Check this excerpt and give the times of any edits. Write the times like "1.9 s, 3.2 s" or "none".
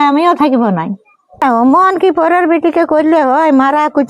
1.4 s